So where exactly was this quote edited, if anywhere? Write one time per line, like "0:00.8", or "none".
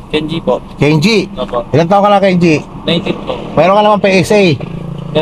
none